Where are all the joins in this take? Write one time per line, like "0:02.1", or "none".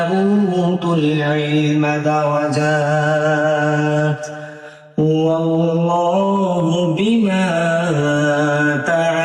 none